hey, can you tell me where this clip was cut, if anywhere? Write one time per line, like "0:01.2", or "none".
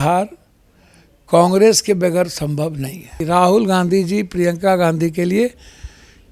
0:03.2